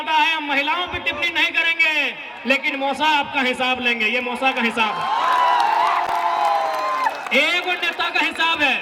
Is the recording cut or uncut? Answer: uncut